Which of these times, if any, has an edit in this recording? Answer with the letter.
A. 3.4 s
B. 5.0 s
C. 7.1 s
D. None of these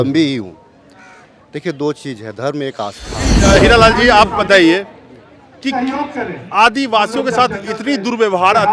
A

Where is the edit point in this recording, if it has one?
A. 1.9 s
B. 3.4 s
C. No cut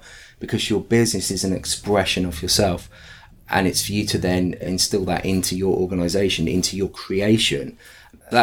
C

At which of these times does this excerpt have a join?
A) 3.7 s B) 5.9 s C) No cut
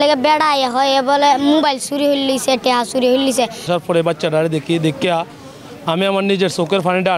A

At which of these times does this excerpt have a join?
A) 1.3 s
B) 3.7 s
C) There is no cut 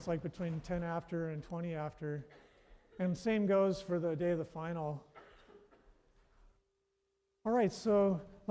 C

